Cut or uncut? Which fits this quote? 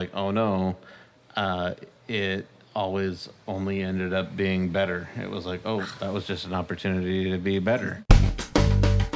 cut